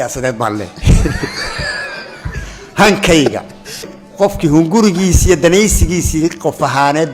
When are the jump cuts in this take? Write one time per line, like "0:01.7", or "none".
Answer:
0:04.0